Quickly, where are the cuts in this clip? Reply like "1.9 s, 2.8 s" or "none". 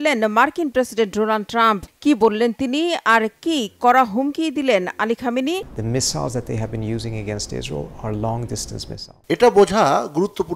5.7 s